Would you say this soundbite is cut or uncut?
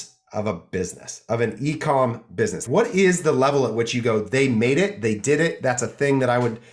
cut